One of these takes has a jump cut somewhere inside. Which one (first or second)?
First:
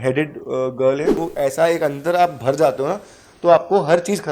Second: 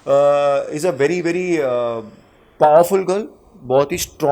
first